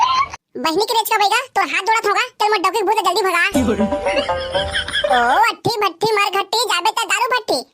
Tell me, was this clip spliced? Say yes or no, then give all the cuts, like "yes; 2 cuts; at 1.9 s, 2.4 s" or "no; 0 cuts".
no; 0 cuts